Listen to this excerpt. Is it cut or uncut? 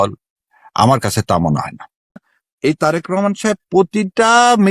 cut